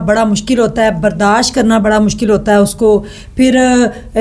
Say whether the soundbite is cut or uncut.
uncut